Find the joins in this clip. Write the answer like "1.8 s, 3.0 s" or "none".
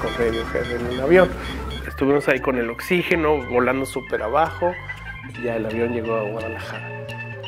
none